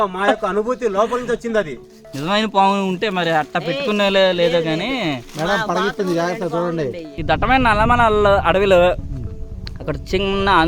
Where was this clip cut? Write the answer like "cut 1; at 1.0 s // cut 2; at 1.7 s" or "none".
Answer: cut 1; at 1.8 s // cut 2; at 7.1 s